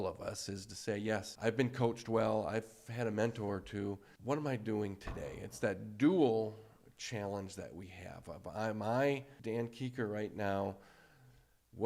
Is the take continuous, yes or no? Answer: no